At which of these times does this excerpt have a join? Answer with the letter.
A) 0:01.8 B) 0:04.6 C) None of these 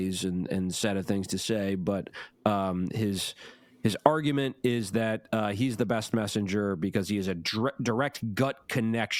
C